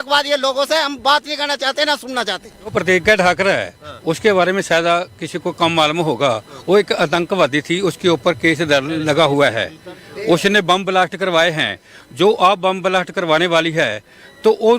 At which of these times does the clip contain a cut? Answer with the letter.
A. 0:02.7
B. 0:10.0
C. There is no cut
A